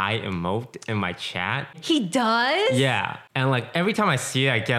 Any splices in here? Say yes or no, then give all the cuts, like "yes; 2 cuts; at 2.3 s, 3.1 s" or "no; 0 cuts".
yes; 2 cuts; at 1.8 s, 3.2 s